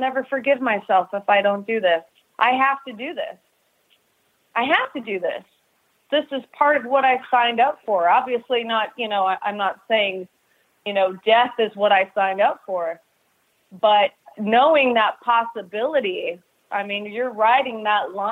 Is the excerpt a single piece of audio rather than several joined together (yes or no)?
no